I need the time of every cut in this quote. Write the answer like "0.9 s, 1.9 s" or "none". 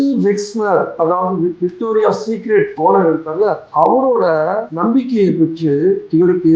0.9 s